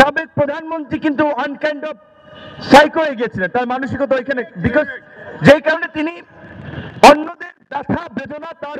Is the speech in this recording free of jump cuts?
yes; 0 cuts

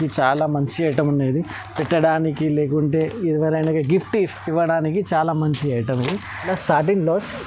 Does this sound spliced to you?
yes; 1 cut; at 6.4 s

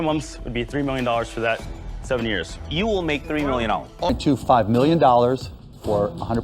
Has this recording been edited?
yes; 1 cut; at 4.0 s

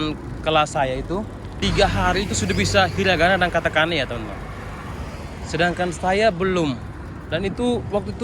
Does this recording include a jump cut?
yes; 1 cut; at 1.5 s

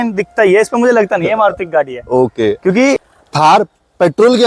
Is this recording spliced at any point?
yes; 1 cut; at 3.2 s

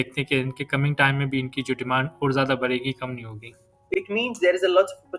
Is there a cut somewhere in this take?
yes; 1 cut; at 3.8 s

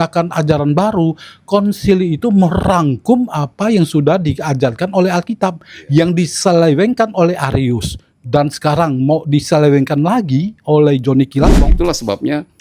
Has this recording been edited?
yes; 1 cut; at 11.7 s

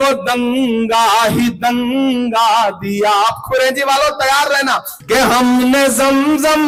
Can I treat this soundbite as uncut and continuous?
yes; 0 cuts

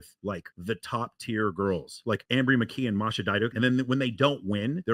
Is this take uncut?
yes; 0 cuts

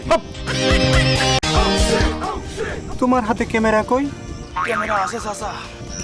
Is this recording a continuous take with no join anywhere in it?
no; 1 cut; at 1.4 s

